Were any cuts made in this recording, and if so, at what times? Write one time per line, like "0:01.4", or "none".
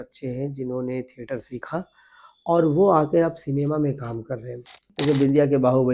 0:04.9